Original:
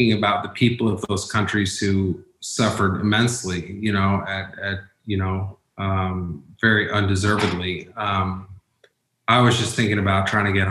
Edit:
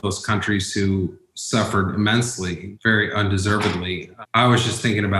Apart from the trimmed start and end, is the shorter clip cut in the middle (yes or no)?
yes